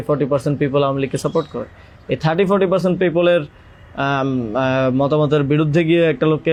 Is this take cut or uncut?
uncut